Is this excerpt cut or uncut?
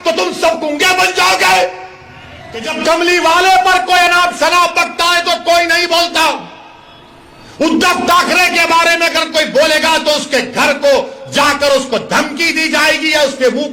cut